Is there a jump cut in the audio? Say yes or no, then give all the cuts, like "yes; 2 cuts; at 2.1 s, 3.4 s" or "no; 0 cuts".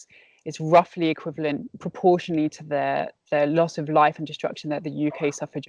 no; 0 cuts